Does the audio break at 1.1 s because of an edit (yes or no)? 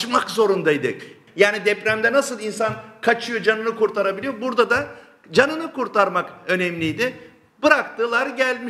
yes